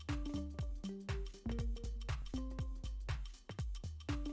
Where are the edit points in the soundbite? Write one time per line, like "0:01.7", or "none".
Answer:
none